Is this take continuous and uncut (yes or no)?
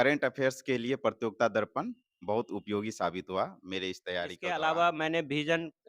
no